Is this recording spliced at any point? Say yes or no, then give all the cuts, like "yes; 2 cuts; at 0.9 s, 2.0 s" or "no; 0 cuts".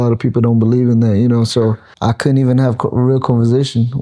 yes; 1 cut; at 1.9 s